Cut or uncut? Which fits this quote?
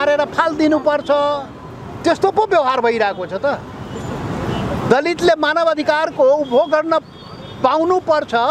uncut